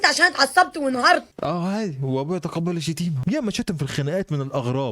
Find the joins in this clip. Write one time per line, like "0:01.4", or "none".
none